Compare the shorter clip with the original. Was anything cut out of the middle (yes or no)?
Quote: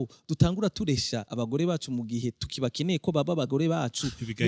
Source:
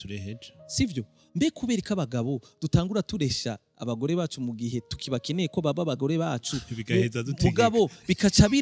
yes